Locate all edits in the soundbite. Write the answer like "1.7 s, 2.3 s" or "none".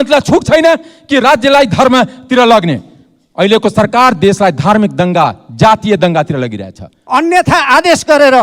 6.9 s